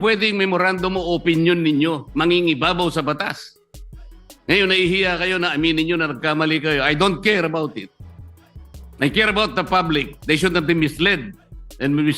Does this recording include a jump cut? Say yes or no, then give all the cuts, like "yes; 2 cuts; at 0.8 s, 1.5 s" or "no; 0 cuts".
no; 0 cuts